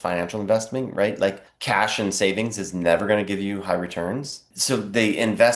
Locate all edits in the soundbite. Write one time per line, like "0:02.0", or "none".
0:01.5
0:04.5